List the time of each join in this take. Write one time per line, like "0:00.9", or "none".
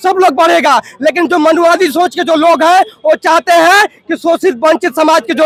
none